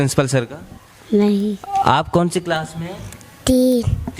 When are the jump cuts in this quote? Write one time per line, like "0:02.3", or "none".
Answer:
0:01.6